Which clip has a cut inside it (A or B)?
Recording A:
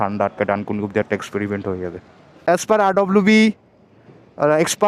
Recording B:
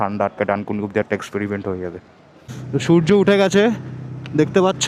A